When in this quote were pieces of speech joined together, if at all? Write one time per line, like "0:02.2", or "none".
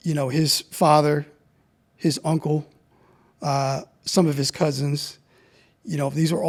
none